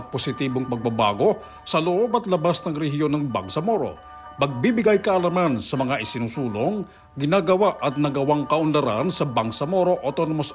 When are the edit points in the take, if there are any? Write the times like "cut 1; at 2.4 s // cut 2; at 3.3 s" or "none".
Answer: none